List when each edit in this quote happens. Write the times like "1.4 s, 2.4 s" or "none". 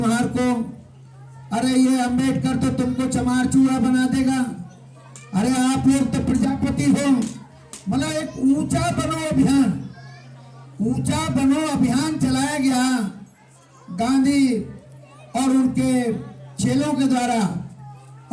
none